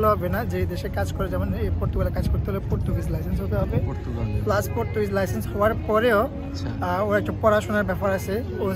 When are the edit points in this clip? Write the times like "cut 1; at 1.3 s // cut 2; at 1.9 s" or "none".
none